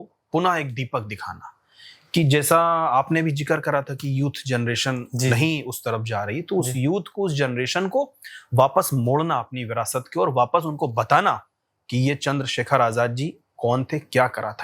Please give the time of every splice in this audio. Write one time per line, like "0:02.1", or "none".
none